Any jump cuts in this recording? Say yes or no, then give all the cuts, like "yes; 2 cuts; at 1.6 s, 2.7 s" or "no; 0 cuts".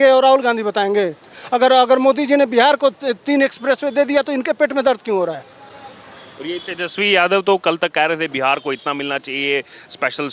no; 0 cuts